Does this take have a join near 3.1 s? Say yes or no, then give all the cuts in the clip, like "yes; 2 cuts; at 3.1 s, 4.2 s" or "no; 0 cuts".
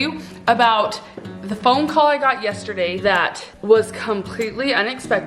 yes; 1 cut; at 3.1 s